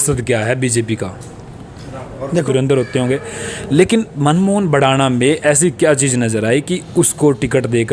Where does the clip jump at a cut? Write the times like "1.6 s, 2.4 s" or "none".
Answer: 2.4 s